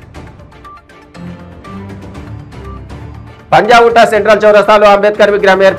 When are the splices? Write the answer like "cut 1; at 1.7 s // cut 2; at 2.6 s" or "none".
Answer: cut 1; at 1.4 s